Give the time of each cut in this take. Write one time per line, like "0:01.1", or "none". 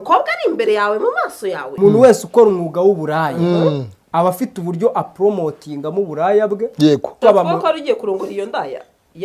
0:01.6
0:07.1